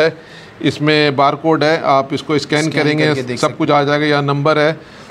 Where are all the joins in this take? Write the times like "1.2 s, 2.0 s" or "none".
none